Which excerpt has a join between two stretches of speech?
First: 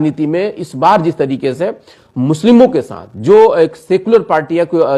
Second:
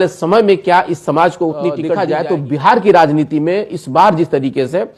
second; 1 cut; at 1.9 s

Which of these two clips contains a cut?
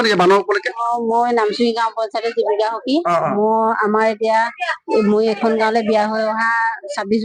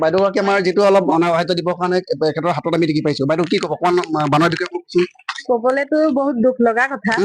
second; 1 cut; at 1.1 s

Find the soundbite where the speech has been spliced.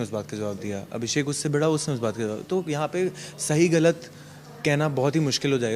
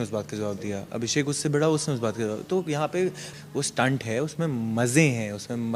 second; 1 cut; at 3.3 s

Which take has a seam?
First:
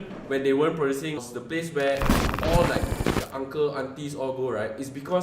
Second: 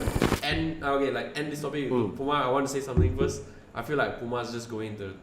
first; 1 cut; at 1.2 s

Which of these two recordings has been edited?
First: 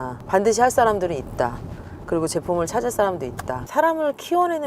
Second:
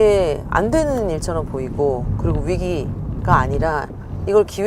first; 1 cut; at 3.6 s

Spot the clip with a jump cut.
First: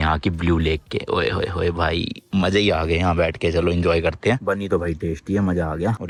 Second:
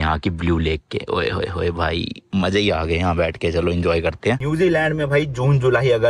second; 1 cut; at 4.4 s

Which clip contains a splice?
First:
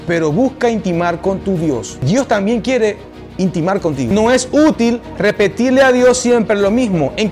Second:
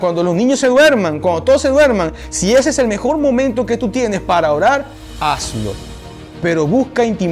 first; 2 cuts; at 2.0 s, 4.1 s

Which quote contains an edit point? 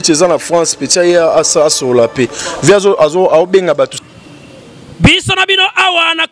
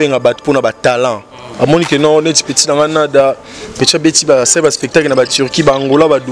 first; 1 cut; at 4.0 s

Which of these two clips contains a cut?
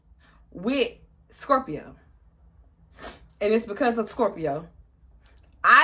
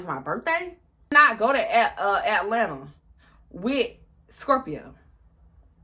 second; 1 cut; at 1.1 s

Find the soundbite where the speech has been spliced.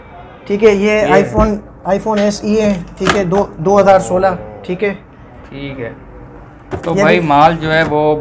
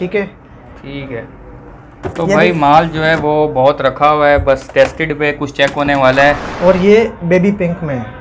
second; 1 cut; at 6.5 s

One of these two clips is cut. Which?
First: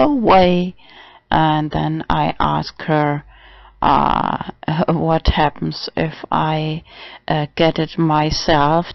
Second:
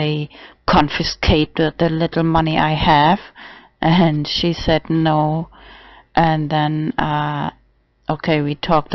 first; 1 cut; at 2.7 s

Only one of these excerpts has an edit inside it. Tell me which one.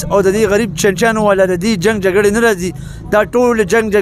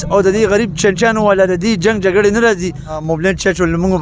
second; 1 cut; at 3.0 s

